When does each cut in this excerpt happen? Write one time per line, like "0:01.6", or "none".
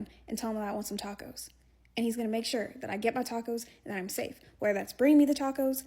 0:02.5